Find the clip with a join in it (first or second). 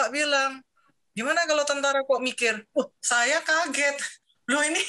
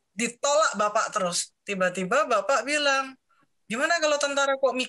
second